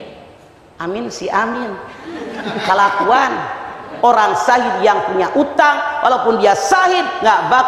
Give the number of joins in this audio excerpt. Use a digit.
1